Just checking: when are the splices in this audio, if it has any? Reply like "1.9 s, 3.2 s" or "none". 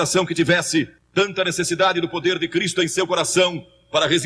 1.0 s

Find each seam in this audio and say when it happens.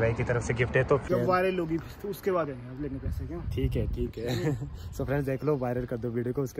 1.0 s

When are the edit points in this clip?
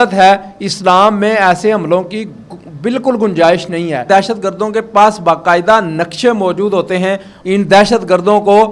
4.0 s, 7.3 s

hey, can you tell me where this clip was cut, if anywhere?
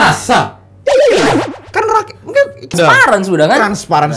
2.7 s

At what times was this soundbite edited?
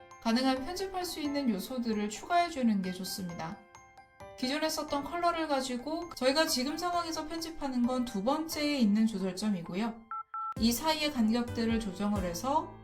6.1 s

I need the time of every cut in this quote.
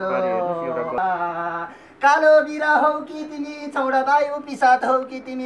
1.0 s

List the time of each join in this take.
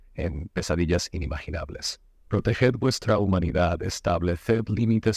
none

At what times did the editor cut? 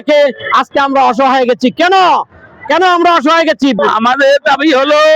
3.8 s

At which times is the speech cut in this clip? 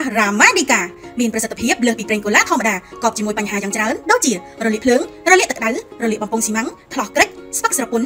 none

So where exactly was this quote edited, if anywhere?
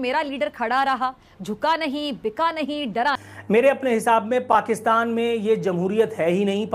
3.3 s

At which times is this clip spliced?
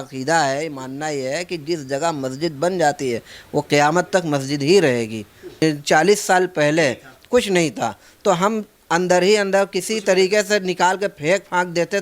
5.6 s

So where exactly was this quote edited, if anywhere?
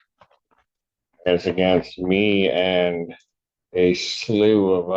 none

